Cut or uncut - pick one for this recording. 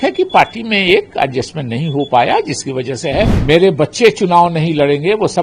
cut